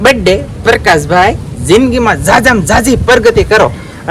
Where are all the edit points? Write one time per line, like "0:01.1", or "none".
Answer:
none